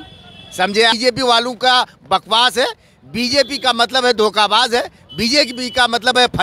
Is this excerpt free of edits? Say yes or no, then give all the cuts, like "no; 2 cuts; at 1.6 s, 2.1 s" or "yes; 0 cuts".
no; 1 cut; at 0.9 s